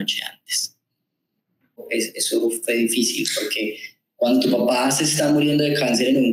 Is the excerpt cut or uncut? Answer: cut